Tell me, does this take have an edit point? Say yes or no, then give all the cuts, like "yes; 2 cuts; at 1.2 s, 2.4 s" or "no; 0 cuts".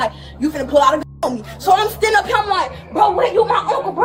no; 0 cuts